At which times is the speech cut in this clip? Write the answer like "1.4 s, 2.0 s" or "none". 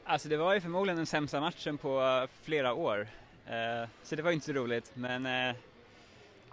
none